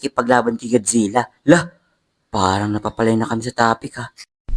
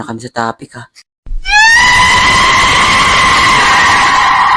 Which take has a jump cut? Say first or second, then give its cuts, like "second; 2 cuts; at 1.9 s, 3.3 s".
first; 1 cut; at 1.3 s